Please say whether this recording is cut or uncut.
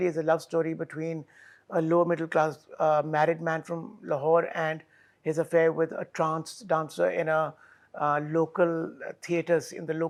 uncut